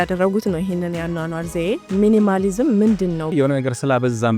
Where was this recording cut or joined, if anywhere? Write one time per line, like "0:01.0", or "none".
0:01.8
0:03.3